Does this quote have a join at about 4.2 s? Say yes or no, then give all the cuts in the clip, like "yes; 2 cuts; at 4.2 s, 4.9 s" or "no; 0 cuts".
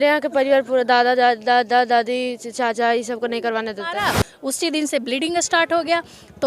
yes; 1 cut; at 4.2 s